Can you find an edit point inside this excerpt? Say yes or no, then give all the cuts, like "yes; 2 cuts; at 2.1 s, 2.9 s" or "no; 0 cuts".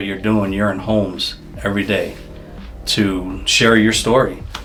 no; 0 cuts